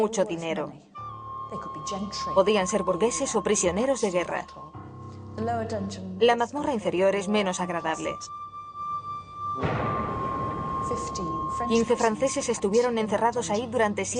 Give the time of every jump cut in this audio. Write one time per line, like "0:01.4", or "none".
0:06.8